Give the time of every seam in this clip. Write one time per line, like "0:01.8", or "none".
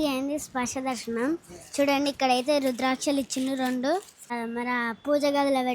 0:04.4